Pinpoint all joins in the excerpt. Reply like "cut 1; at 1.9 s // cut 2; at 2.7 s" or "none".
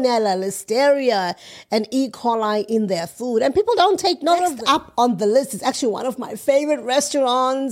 cut 1; at 4.6 s